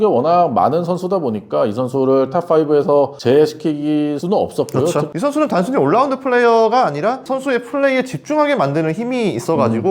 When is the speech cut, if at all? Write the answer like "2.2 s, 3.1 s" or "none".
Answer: 5.1 s